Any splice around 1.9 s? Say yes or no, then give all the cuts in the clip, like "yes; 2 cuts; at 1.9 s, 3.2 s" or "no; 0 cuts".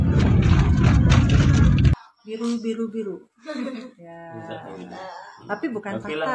yes; 1 cut; at 1.9 s